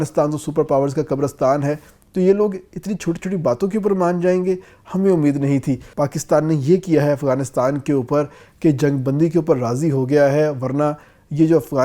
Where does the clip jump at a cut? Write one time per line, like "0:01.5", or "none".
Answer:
0:05.9